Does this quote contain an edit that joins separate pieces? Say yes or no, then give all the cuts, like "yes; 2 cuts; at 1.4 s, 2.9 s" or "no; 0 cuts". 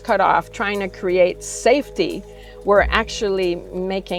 no; 0 cuts